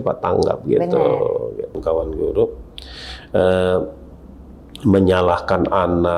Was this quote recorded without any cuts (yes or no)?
no